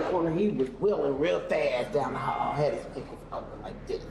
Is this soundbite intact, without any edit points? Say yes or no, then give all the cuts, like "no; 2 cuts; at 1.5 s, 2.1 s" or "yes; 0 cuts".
yes; 0 cuts